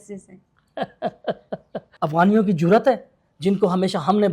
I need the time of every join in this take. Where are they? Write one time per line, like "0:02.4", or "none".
0:01.9